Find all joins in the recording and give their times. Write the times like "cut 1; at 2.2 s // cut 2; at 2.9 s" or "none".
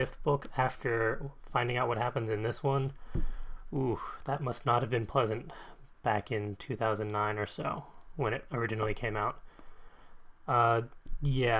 none